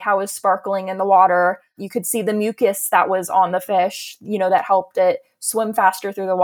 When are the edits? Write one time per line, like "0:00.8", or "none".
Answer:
0:01.8